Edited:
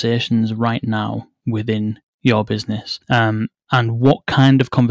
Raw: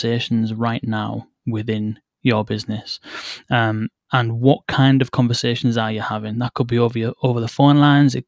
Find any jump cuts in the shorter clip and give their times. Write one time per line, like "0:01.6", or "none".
0:02.9